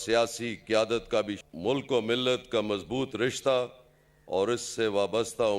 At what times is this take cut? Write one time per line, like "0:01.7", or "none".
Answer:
0:01.4